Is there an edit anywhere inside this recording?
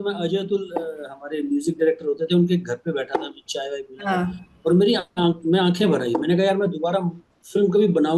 no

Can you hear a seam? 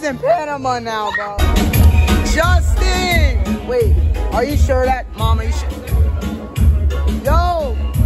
yes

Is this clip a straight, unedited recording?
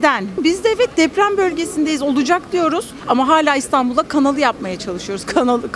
yes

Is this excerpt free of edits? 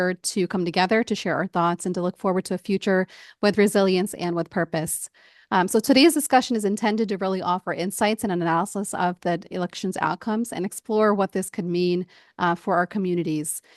yes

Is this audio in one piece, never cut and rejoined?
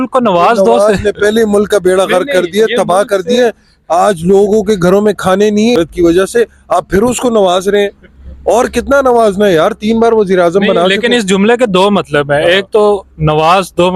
yes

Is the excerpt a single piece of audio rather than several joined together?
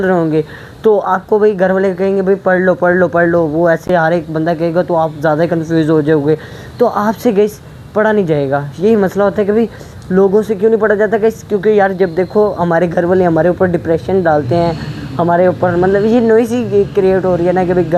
yes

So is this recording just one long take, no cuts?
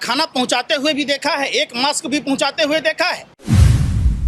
no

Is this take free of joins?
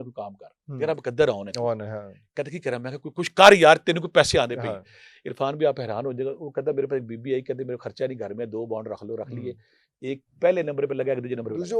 yes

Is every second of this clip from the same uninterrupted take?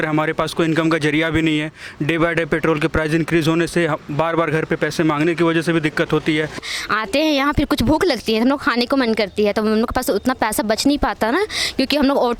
no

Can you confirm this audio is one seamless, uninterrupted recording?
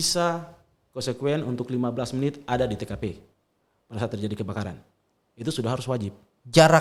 yes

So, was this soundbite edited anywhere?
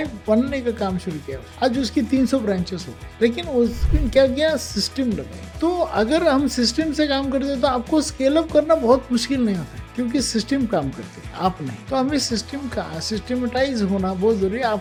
no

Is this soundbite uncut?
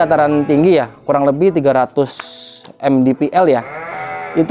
yes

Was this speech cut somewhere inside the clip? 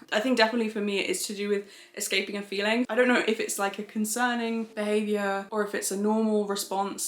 yes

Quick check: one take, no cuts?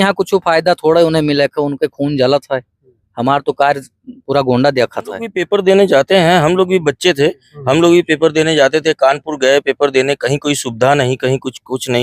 no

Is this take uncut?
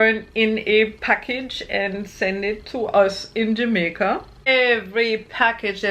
no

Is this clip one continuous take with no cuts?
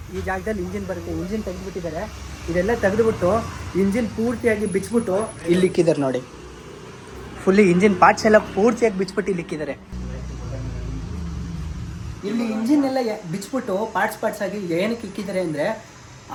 yes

